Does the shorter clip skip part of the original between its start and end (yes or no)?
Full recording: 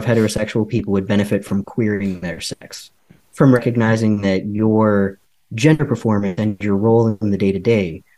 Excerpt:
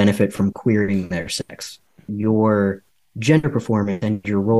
yes